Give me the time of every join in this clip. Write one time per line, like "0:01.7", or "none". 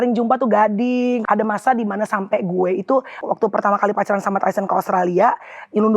0:01.2
0:03.2